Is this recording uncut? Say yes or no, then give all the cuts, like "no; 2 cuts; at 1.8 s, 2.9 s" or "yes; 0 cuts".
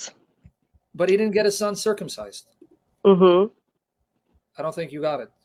yes; 0 cuts